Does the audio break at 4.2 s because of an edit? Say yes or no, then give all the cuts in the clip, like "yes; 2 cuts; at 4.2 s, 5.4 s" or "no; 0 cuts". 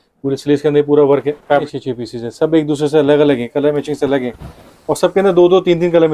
no; 1 cut; at 1.7 s